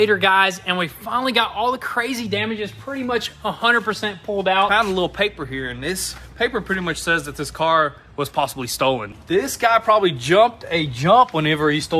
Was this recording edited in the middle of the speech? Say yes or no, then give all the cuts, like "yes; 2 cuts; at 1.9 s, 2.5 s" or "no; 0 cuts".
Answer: yes; 2 cuts; at 4.7 s, 9.1 s